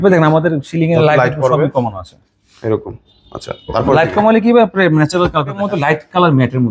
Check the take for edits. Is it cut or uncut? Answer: cut